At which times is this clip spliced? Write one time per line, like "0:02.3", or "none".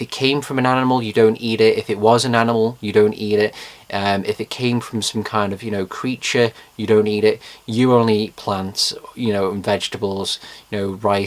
0:04.6